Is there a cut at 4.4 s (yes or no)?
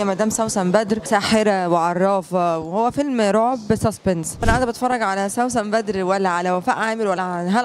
yes